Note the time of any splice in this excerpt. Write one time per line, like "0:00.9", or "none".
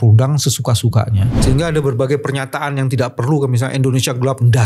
0:01.3